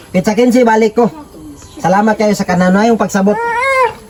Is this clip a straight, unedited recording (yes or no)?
yes